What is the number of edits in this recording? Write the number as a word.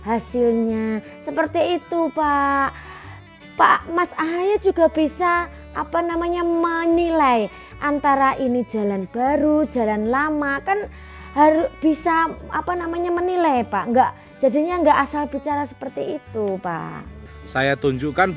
one